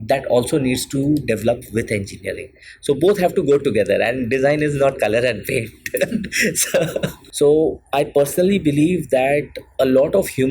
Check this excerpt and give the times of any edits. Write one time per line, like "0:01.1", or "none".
0:07.1